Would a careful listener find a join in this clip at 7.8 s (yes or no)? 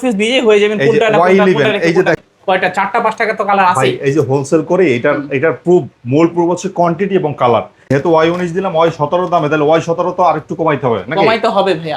yes